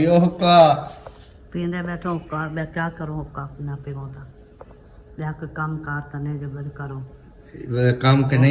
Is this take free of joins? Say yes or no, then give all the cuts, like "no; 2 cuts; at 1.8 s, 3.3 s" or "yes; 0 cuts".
yes; 0 cuts